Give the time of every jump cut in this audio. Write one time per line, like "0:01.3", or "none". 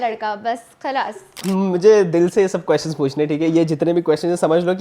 0:01.4